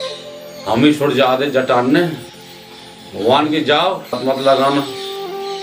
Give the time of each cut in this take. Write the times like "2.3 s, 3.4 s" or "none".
4.2 s